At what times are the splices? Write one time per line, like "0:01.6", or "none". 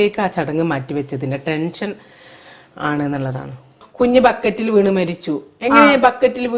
0:03.8

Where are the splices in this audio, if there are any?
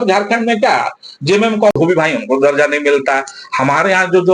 0:01.7

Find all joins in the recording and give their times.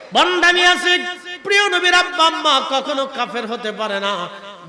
none

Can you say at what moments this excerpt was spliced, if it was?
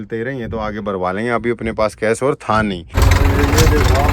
0:02.9

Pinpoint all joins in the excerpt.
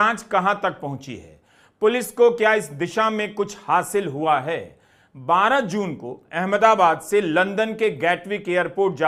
none

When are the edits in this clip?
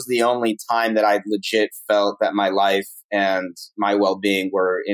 none

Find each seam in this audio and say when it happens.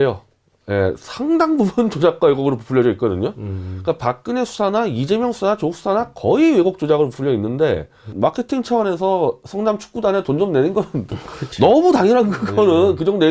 0:08.1

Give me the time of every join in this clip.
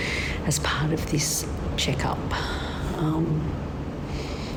none

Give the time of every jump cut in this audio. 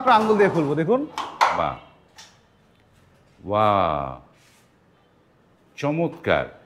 none

